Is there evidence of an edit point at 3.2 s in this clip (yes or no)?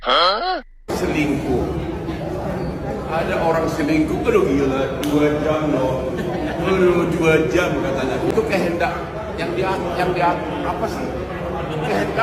no